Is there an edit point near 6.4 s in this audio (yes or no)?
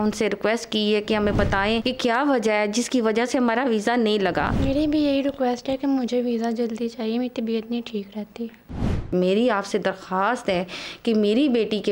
no